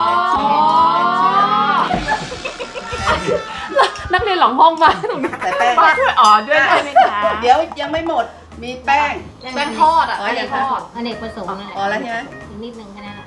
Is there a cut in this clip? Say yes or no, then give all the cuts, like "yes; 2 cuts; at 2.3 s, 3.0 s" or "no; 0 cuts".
no; 0 cuts